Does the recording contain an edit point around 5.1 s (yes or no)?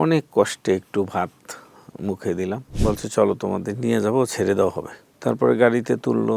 yes